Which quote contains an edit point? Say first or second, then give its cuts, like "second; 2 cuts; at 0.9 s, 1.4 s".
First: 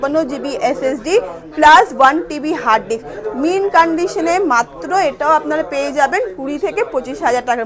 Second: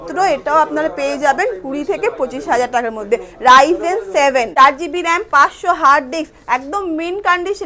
second; 1 cut; at 4.5 s